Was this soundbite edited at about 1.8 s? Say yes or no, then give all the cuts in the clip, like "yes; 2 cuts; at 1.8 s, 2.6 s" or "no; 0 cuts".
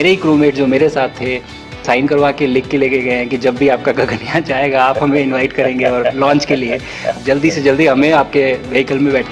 yes; 2 cuts; at 1.8 s, 7.2 s